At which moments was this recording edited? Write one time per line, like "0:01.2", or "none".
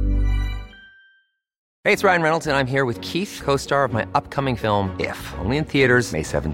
0:01.7